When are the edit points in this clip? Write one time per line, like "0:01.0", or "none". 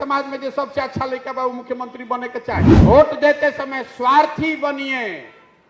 0:02.8